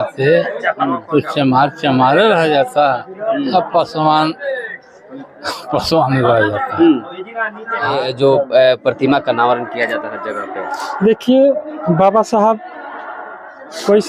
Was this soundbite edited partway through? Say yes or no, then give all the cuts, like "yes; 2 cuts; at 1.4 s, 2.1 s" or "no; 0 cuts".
yes; 1 cut; at 7.9 s